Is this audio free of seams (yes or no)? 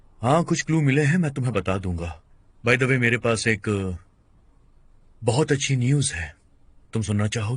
yes